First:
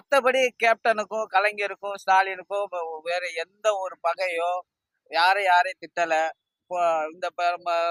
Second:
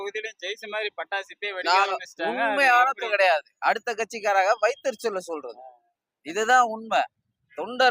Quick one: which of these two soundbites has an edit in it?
second; 1 cut; at 3.1 s

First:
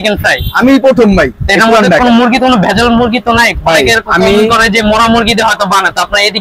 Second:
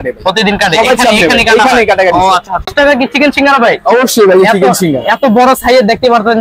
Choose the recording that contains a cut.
second; 1 cut; at 2.7 s

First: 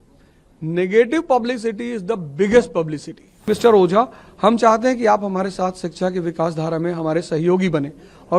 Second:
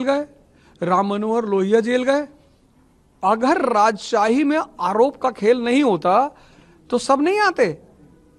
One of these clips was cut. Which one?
first; 1 cut; at 3.5 s

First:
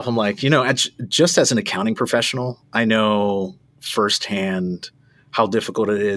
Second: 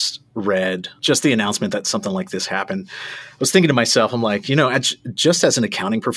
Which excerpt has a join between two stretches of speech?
second; 1 cut; at 0.9 s

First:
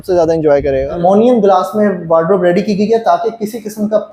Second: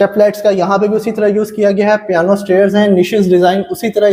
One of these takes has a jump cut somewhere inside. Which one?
first; 1 cut; at 1.0 s

